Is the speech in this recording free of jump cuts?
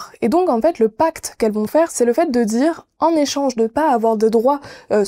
no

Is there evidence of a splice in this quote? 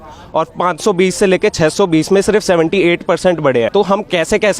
yes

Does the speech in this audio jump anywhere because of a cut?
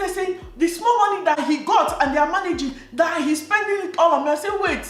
yes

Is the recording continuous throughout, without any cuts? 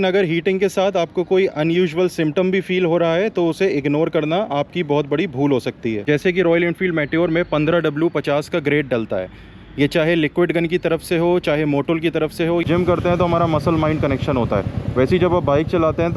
no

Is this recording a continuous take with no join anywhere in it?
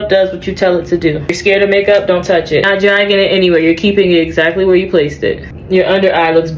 no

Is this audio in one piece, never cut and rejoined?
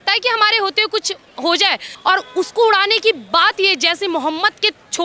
no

